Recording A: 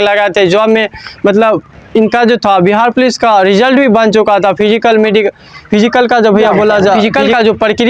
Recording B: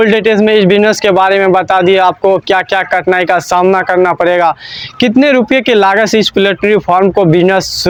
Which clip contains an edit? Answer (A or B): A